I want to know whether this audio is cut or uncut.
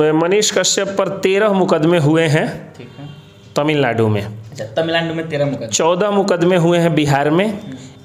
uncut